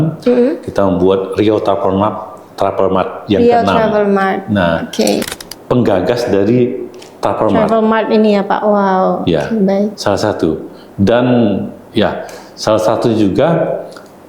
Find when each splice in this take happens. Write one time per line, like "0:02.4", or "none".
0:05.3